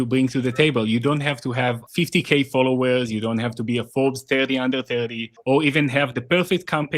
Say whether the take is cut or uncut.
cut